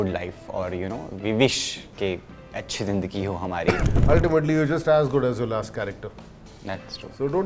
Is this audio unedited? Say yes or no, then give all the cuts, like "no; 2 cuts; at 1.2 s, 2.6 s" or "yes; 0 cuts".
no; 1 cut; at 3.8 s